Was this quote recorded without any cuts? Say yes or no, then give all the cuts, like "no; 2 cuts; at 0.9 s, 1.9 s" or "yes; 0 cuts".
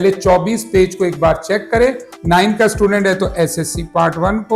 no; 1 cut; at 2.1 s